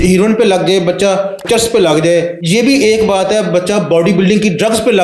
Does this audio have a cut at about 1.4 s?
yes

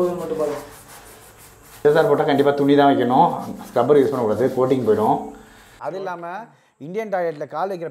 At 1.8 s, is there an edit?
yes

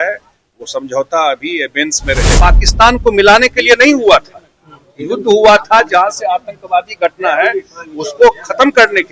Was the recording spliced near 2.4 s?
yes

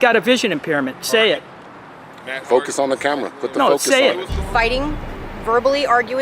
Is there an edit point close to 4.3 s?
yes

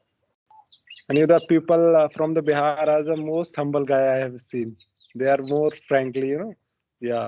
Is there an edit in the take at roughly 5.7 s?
no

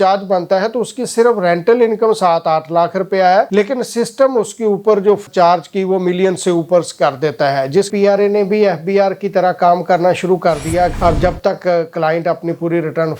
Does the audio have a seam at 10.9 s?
yes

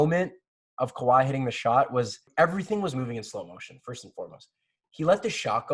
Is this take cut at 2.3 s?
yes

